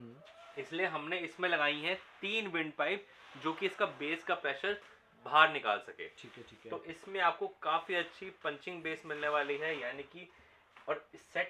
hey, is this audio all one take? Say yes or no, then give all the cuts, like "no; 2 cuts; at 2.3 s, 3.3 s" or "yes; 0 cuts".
yes; 0 cuts